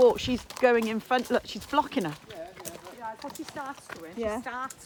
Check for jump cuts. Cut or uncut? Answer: uncut